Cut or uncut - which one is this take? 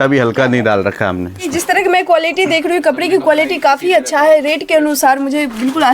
cut